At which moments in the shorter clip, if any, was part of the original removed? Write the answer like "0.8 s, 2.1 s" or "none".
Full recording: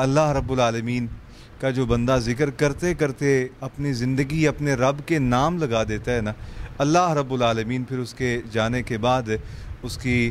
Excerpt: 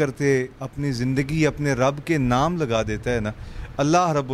none